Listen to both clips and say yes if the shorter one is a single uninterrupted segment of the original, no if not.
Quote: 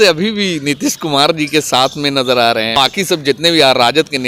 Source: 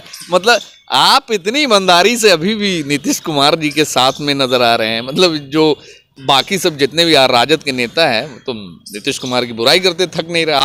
no